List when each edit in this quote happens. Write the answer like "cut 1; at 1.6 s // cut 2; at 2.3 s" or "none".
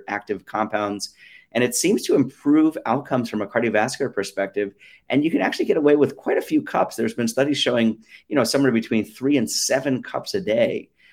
none